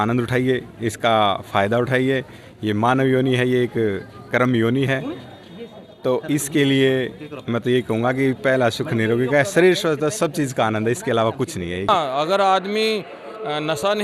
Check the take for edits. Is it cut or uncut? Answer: cut